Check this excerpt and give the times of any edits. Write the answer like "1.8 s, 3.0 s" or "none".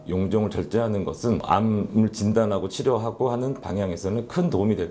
1.4 s